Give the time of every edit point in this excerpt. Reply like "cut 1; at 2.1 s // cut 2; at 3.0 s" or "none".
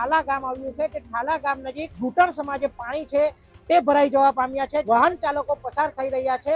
cut 1; at 1.9 s // cut 2; at 4.8 s